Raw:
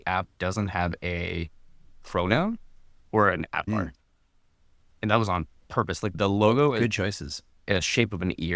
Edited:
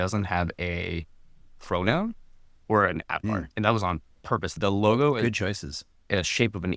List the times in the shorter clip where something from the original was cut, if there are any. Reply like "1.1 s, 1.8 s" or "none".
3.5 s, 4.5 s